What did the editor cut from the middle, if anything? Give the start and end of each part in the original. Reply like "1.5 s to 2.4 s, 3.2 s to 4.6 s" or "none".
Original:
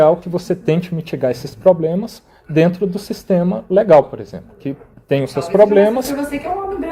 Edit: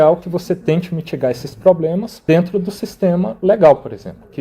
2.1 s to 2.4 s